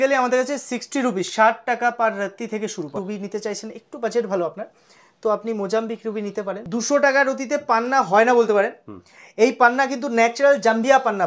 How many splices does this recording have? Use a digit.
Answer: 2